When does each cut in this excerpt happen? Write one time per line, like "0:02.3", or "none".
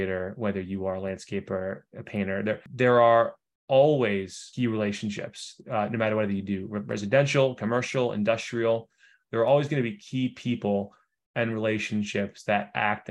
0:02.7
0:04.4